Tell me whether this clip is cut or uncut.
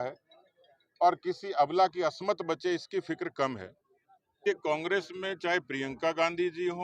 cut